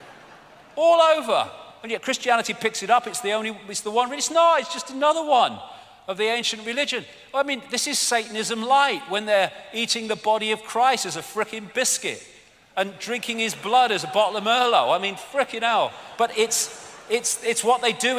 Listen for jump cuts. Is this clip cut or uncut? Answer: cut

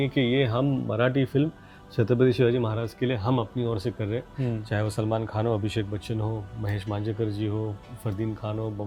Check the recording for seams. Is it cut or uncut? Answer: uncut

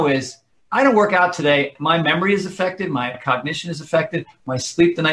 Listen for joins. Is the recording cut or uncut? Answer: cut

